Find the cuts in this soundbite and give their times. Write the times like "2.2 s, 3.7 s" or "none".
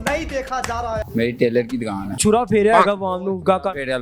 1.0 s, 2.2 s